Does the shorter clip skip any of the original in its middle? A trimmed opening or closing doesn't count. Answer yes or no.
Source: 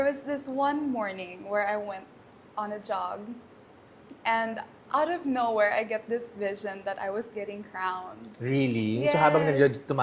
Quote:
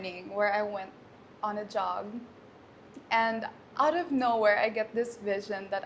no